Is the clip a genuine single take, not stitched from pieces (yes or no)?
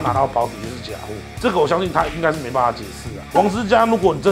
no